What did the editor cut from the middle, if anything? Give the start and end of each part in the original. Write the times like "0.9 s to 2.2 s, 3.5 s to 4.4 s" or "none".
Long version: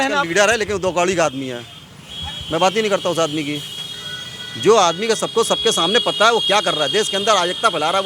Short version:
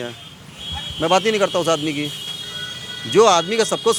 none